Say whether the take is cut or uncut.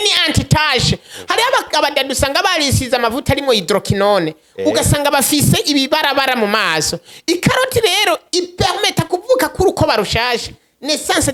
uncut